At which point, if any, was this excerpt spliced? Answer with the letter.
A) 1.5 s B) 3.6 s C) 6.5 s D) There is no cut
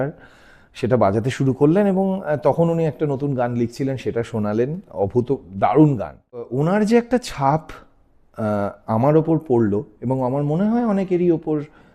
C